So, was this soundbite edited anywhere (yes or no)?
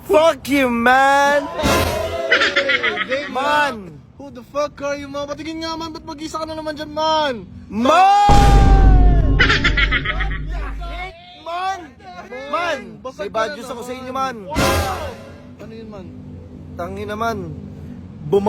no